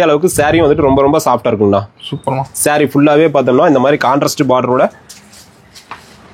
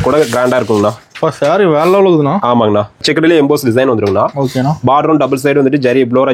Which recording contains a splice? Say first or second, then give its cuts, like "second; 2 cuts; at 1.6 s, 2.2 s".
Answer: second; 1 cut; at 3.0 s